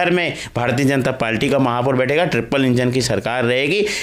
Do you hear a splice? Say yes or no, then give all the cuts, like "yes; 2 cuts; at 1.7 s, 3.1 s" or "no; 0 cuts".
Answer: no; 0 cuts